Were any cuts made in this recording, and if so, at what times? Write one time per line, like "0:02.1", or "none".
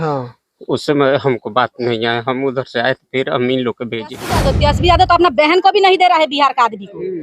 0:04.4